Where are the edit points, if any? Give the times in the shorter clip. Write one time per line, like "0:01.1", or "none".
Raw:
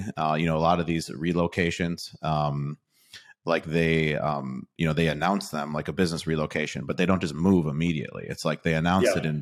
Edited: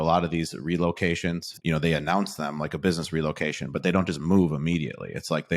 0:01.5